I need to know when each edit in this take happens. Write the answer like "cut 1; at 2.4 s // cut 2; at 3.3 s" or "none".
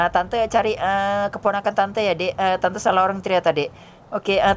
none